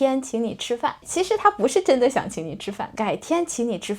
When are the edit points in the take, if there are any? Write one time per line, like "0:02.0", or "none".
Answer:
0:01.0
0:02.9

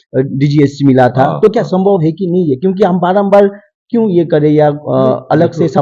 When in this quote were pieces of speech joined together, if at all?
none

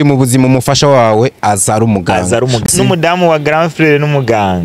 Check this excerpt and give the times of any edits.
0:02.6

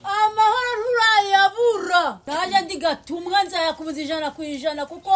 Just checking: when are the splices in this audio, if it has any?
0:02.2

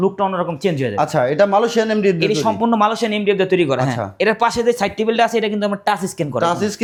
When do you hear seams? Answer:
none

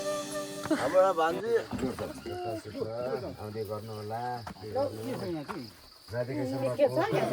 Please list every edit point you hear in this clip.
0:02.3

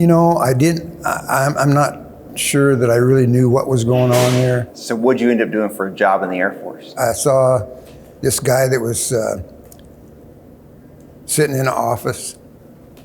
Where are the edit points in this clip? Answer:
0:04.8
0:07.0

